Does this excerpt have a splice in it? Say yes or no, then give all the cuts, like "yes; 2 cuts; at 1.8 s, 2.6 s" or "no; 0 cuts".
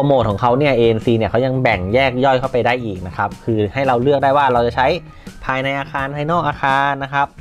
no; 0 cuts